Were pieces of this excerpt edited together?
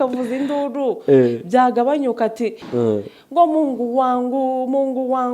yes; 1 cut; at 2.6 s

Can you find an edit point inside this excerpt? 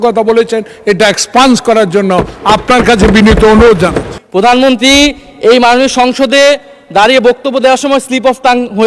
yes; 1 cut; at 4.1 s

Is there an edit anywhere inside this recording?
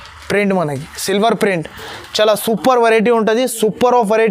no; 0 cuts

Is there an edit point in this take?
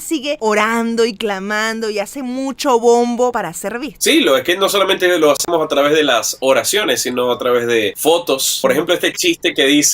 yes; 1 cut; at 8.6 s

